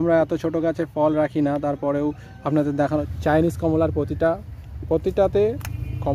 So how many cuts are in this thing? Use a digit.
1